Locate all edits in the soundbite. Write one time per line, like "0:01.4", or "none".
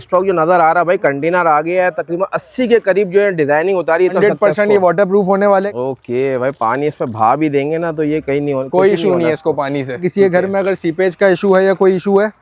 0:04.1
0:05.7
0:10.1